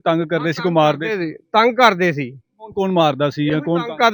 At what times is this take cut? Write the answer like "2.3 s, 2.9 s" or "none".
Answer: none